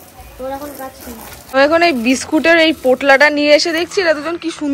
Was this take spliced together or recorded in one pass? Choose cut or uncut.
cut